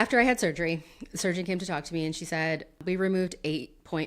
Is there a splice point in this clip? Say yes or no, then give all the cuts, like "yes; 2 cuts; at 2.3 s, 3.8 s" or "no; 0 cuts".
yes; 1 cut; at 2.8 s